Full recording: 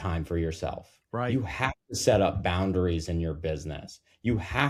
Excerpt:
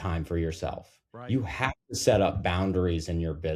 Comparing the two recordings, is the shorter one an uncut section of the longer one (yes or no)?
yes